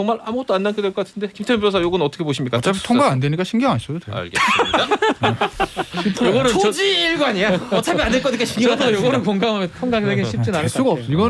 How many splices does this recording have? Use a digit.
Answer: 0